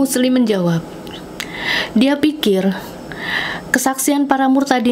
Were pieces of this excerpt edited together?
no; 0 cuts

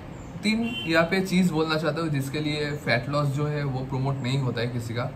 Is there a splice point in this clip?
no; 0 cuts

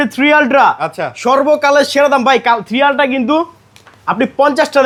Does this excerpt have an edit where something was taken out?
no; 0 cuts

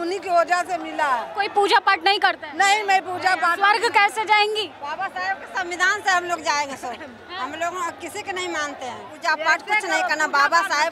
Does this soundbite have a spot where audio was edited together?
yes; 3 cuts; at 1.3 s, 4.8 s, 9.1 s

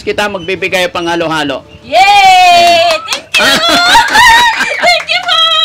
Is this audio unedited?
yes; 0 cuts

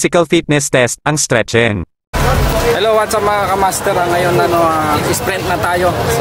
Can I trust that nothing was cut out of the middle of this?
no; 1 cut; at 2.1 s

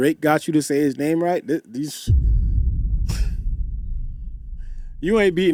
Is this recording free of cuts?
yes; 0 cuts

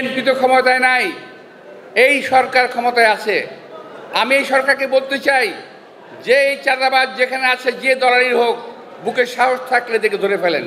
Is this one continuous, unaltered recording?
yes; 0 cuts

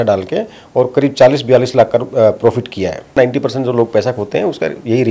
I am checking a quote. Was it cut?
yes; 1 cut; at 3.2 s

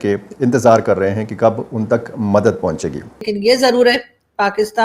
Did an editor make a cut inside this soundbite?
yes; 1 cut; at 3.3 s

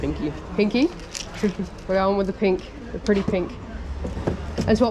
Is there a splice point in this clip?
no; 0 cuts

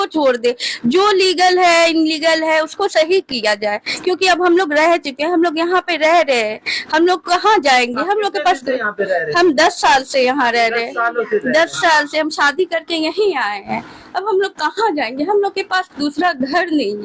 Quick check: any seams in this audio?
no; 0 cuts

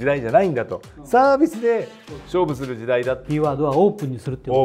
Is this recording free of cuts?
no; 1 cut; at 3.2 s

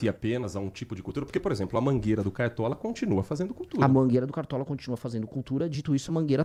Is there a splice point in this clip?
no; 0 cuts

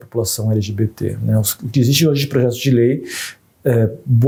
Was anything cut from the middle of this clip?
no; 0 cuts

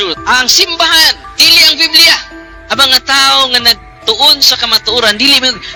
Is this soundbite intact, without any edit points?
yes; 0 cuts

